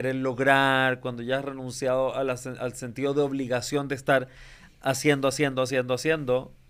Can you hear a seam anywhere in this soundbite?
no; 0 cuts

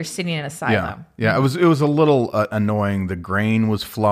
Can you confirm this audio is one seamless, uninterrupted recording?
yes; 0 cuts

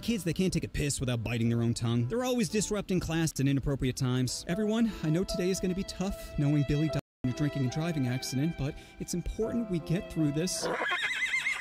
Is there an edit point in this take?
yes; 1 cut; at 3.3 s

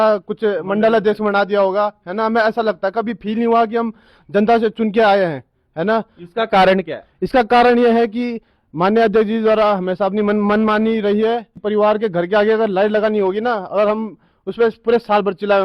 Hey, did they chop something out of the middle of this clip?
yes; 1 cut; at 11.5 s

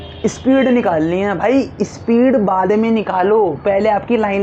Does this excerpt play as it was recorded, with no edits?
yes; 0 cuts

